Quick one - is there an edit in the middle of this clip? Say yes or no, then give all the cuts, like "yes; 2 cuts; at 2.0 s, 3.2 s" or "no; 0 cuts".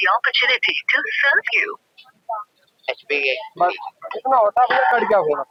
no; 0 cuts